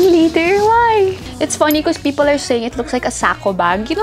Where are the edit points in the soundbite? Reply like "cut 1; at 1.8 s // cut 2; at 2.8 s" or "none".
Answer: cut 1; at 1.3 s